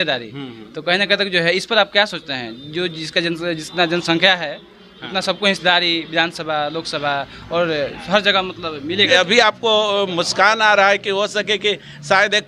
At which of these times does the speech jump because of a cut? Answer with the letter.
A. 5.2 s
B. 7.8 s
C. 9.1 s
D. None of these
C